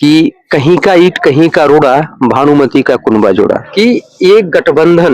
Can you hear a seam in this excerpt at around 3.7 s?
yes; 1 cut; at 3.7 s

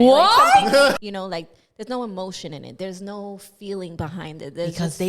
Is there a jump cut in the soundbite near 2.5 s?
no; 1 cut; at 1.0 s

